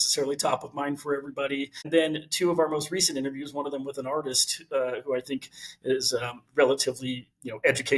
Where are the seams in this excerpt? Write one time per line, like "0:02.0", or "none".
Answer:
0:01.9